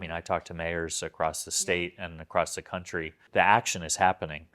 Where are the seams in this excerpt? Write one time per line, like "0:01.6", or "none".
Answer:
0:03.2